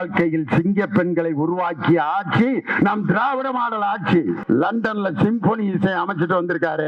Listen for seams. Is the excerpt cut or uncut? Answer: cut